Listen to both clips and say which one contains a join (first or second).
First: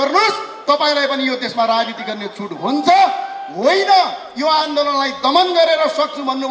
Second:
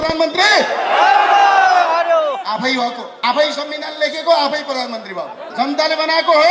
second